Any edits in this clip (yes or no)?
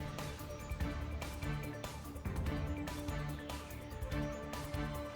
yes